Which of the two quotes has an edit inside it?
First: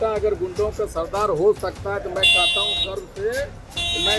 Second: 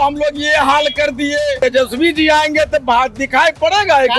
second; 1 cut; at 1.6 s

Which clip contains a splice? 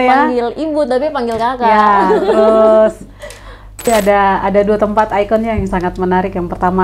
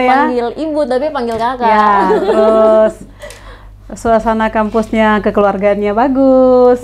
first; 1 cut; at 3.8 s

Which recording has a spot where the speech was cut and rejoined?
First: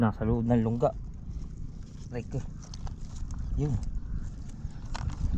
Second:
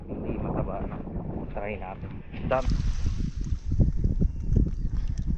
second; 1 cut; at 2.7 s

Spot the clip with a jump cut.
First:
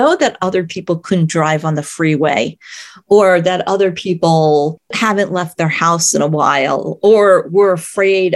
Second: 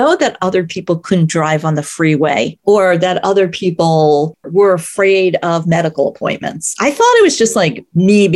second; 2 cuts; at 2.5 s, 4.5 s

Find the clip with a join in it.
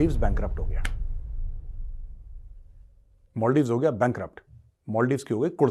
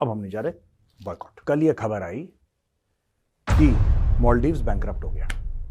second; 1 cut; at 1.3 s

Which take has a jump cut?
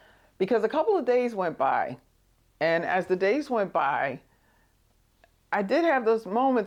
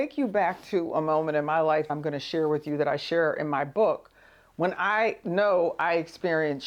second; 1 cut; at 1.9 s

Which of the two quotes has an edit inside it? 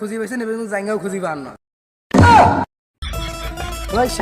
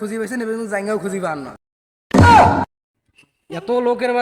first; 1 cut; at 3.0 s

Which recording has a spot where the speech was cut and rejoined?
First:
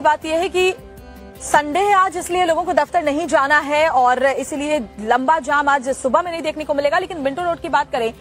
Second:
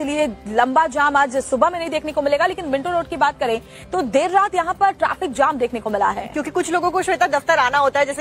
second; 1 cut; at 7.3 s

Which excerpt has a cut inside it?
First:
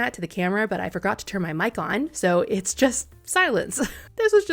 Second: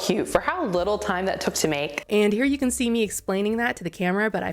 second; 1 cut; at 2.0 s

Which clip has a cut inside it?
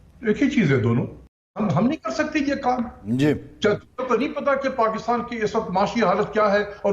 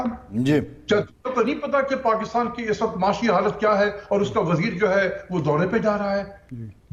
first; 1 cut; at 1.6 s

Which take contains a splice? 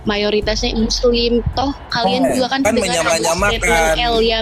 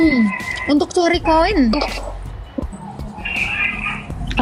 first; 1 cut; at 2.6 s

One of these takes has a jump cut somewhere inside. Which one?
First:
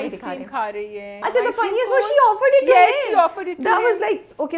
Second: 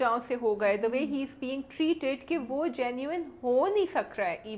first; 1 cut; at 1.1 s

